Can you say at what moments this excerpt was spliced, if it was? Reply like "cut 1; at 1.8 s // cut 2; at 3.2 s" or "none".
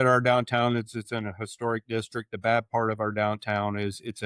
none